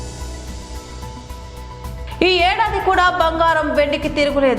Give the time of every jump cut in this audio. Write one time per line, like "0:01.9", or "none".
0:01.4